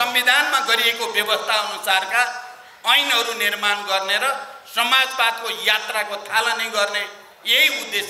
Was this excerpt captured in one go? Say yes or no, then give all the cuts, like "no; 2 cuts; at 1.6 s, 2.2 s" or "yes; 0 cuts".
yes; 0 cuts